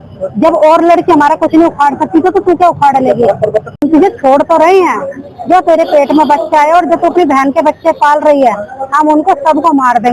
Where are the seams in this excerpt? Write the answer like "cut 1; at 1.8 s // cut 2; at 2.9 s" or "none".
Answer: cut 1; at 3.8 s